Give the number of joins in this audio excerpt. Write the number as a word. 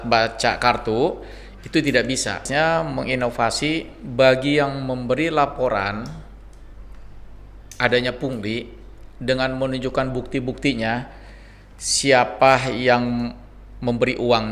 one